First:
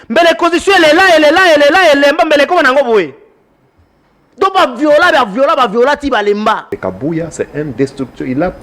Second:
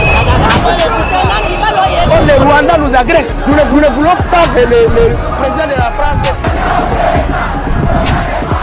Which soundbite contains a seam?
first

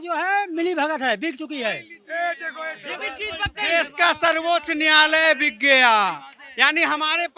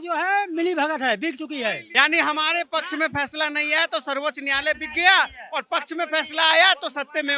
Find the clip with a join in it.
second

